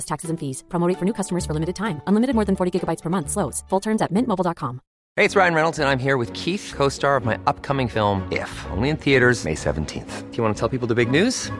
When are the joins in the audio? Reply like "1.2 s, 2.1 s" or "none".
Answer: 5.0 s